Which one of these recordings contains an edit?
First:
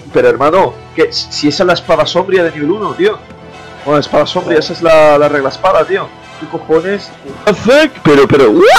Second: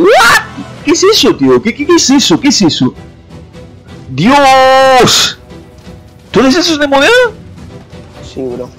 first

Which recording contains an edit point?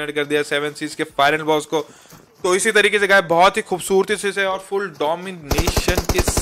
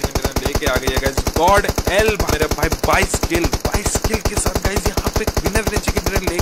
second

